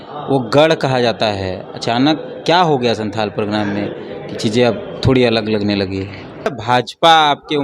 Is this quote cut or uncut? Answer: cut